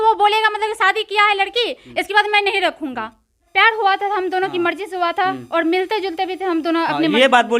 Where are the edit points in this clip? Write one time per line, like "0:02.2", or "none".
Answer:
0:03.5

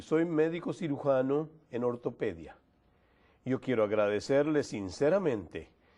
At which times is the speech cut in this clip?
0:01.9

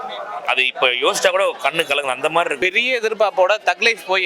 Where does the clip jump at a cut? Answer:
0:02.6

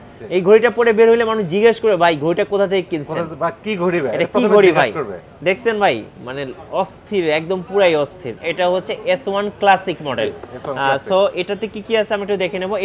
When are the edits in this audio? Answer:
0:08.4

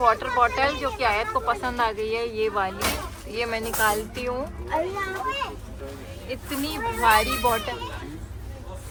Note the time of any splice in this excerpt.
none

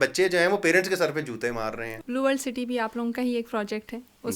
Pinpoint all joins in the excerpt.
0:01.9

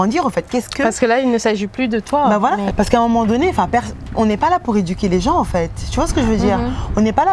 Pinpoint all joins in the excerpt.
0:02.7

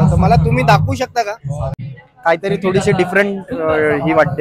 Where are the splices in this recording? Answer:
0:01.6

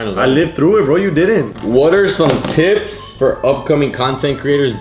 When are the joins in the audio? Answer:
0:01.5

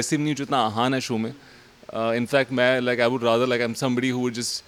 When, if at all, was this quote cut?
none

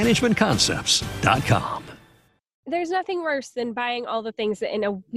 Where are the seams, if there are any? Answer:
0:02.6

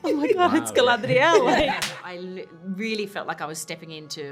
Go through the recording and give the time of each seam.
0:02.0

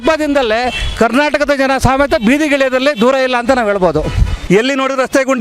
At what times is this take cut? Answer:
0:04.3

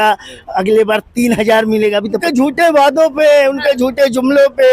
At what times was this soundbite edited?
0:02.2

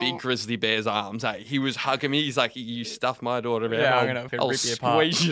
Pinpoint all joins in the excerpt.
0:04.2

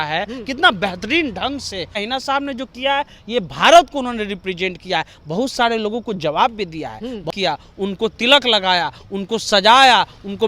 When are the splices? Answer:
0:02.0
0:07.3

